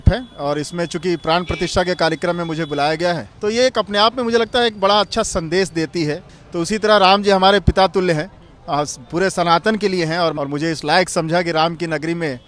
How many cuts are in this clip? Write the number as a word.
three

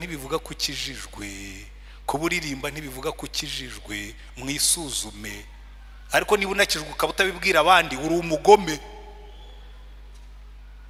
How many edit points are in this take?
zero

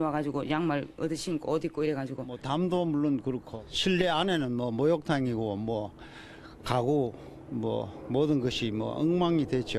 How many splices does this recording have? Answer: zero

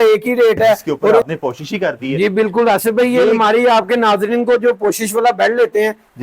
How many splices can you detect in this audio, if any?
one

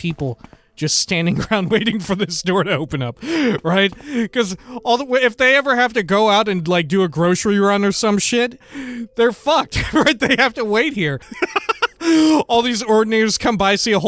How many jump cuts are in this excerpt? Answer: two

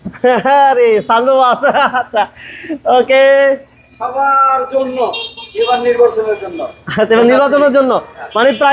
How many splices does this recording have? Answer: zero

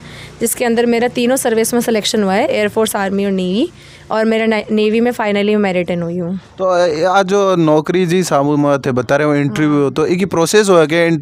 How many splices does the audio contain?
zero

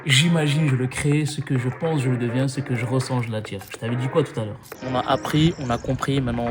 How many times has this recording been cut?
one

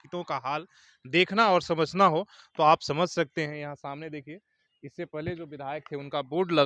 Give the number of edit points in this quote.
zero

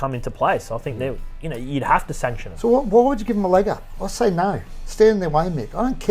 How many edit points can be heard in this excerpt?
one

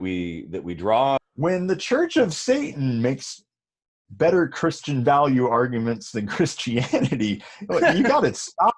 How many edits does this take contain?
one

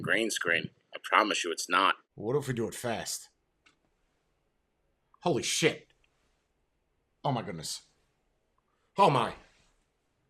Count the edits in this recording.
one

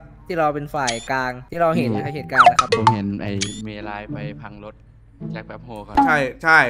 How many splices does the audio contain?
three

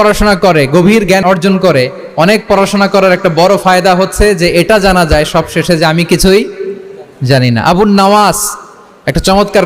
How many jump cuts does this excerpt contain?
zero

